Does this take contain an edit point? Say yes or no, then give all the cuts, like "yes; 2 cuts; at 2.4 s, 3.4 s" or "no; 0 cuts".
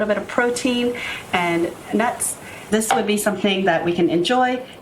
yes; 1 cut; at 2.6 s